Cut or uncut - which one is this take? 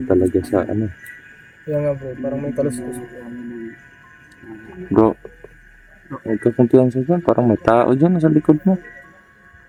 uncut